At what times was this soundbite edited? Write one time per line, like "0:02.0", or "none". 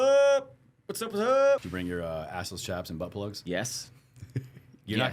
0:01.6
0:03.4